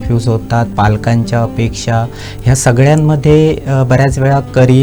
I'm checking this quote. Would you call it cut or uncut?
uncut